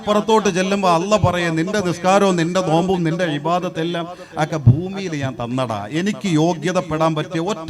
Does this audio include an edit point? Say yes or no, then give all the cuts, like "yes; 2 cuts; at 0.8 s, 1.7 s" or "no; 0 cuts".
no; 0 cuts